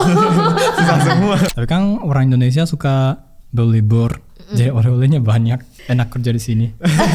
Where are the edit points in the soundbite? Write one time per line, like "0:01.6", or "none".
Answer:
0:01.5
0:05.7